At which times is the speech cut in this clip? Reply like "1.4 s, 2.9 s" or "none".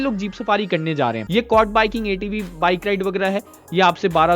1.2 s